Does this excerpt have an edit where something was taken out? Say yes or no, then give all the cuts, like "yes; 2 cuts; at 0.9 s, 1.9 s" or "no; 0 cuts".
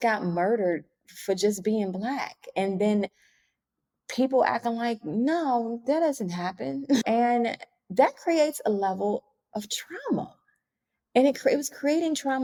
no; 0 cuts